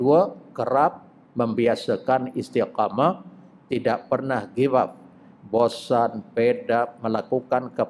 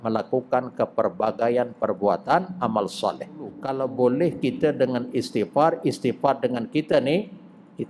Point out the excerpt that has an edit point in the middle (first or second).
second